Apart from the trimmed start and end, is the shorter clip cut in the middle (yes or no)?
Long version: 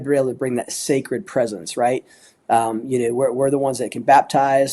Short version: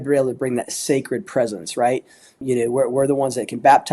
yes